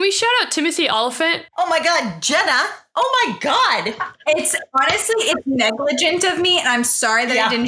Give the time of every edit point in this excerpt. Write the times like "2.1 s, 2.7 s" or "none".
1.2 s